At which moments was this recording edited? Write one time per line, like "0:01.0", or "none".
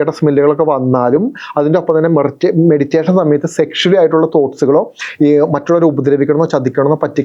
none

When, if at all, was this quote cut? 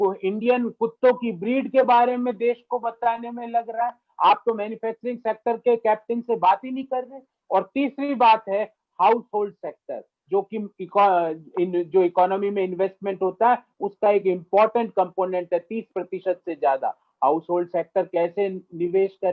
none

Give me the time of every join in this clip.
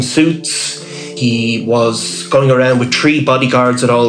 0:01.1

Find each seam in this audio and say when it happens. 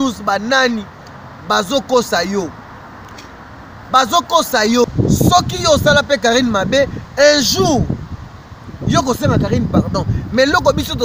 0:04.8

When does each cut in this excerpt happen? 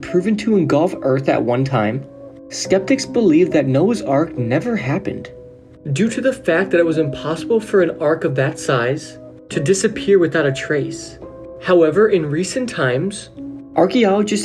none

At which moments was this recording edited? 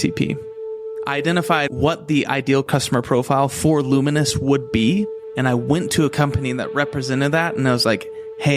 0:00.9

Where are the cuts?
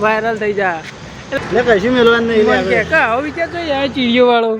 0:01.3

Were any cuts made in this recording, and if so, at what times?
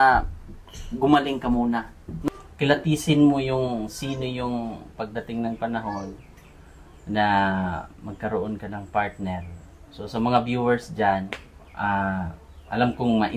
0:02.1

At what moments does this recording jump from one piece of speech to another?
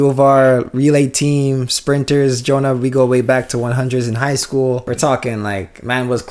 0:04.8

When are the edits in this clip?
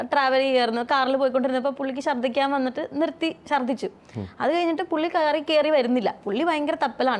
none

